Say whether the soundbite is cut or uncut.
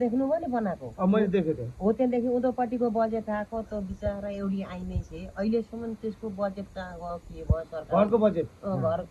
uncut